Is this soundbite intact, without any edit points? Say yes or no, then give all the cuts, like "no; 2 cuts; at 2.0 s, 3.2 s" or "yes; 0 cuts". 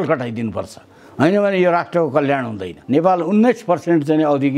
no; 1 cut; at 2.7 s